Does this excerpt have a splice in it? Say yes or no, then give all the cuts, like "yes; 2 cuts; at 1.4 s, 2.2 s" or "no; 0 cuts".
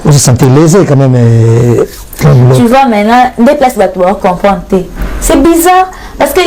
no; 0 cuts